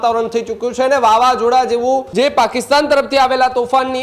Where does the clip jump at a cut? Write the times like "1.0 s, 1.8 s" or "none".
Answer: 2.1 s